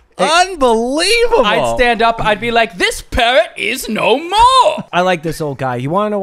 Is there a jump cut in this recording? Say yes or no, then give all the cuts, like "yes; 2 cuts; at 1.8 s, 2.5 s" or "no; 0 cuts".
yes; 1 cut; at 4.8 s